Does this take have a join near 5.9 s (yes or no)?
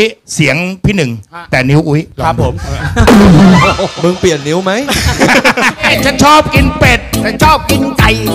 yes